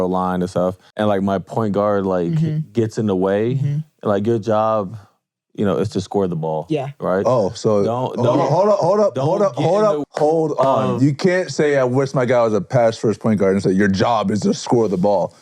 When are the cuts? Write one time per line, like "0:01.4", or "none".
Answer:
0:00.8
0:10.1